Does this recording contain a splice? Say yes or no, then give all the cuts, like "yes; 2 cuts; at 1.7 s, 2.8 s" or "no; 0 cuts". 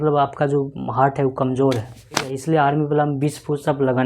yes; 1 cut; at 2.3 s